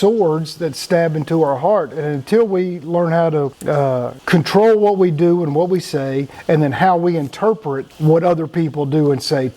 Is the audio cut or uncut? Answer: cut